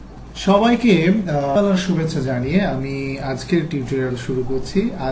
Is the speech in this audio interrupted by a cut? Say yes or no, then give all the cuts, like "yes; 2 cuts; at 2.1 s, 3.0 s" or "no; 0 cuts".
yes; 1 cut; at 1.5 s